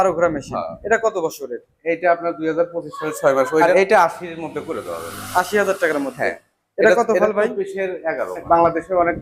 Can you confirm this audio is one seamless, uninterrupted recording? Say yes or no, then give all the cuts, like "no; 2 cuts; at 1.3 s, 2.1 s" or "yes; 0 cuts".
no; 2 cuts; at 3.6 s, 8.4 s